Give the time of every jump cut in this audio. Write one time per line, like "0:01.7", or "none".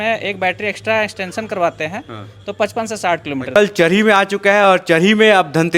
0:03.5

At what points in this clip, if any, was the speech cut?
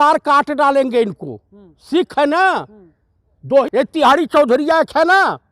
0:03.6

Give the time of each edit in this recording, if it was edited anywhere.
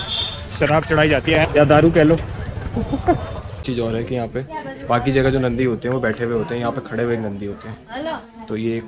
0:01.3
0:03.6

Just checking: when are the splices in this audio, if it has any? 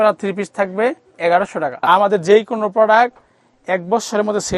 0:01.9

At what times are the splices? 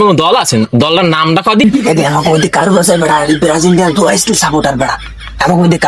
0:01.6

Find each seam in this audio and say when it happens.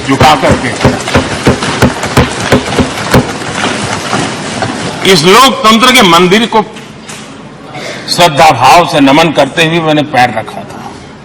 none

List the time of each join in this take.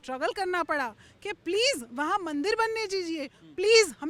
none

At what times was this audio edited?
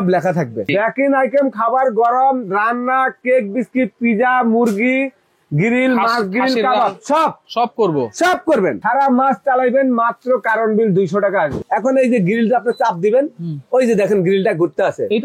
0:00.8
0:08.8
0:11.6

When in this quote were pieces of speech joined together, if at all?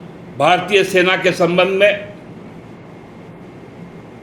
none

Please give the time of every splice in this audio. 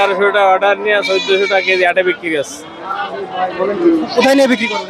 none

